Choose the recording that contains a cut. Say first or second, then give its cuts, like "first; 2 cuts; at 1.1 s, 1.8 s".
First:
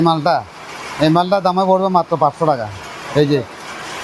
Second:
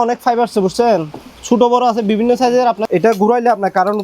second; 1 cut; at 2.8 s